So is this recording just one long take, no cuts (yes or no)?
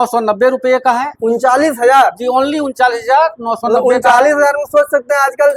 yes